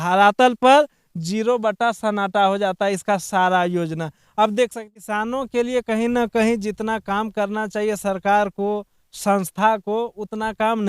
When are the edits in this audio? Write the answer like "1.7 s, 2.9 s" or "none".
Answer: 5.1 s